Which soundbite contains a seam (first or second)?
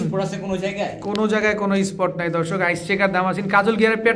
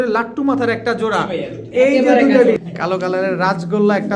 second